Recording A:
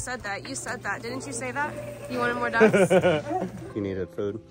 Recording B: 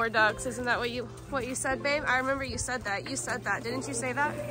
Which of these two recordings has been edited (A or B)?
A